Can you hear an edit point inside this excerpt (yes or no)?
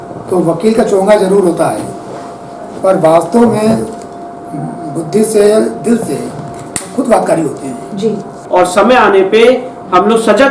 yes